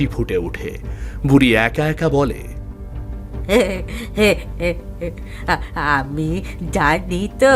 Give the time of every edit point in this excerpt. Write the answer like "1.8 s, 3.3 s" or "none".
none